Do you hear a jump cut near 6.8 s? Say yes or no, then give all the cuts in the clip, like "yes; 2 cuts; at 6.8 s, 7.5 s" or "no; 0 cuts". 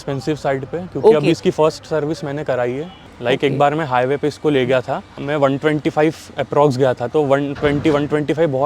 no; 2 cuts; at 3.0 s, 5.1 s